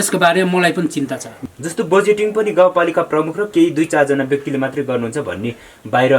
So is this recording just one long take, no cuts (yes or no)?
no